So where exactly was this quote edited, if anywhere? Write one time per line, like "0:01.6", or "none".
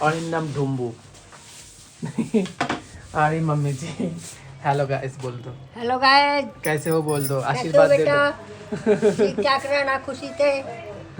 none